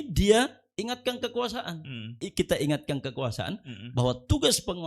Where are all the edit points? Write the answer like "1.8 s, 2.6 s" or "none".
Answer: 2.2 s